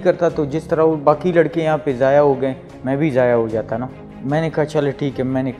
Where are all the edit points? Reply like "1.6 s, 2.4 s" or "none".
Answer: none